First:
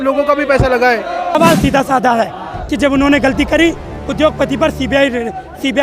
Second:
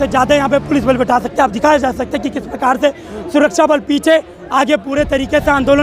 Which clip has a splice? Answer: first; 1 cut; at 1.4 s

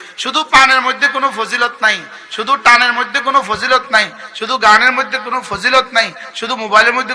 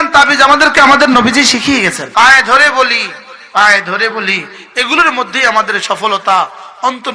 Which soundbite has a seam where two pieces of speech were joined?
second; 1 cut; at 2.0 s

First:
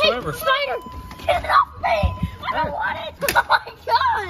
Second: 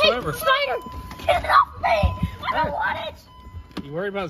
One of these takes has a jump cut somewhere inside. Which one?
first; 1 cut; at 3.1 s

